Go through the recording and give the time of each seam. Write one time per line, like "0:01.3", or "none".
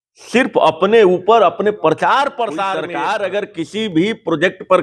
0:02.8